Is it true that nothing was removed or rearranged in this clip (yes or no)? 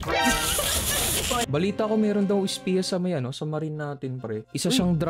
no